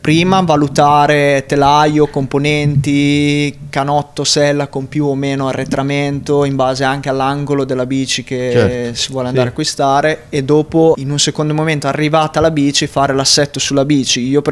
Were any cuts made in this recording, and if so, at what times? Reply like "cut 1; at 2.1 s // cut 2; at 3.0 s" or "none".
none